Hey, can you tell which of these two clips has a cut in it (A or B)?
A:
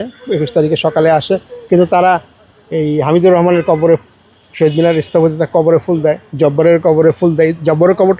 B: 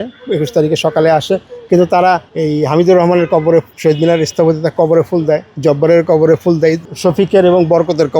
B